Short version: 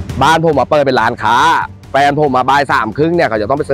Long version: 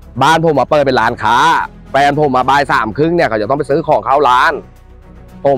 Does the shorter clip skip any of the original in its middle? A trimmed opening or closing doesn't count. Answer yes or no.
no